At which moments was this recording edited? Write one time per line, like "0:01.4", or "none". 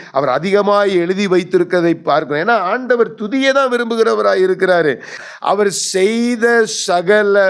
0:05.2